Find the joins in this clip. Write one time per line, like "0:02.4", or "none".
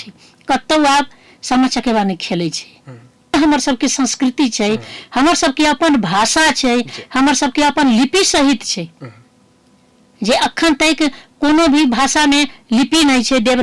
0:03.3